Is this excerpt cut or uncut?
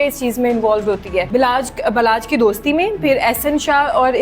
cut